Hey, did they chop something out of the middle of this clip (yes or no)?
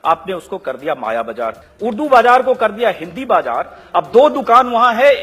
yes